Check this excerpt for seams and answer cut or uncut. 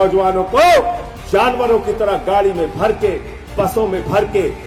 uncut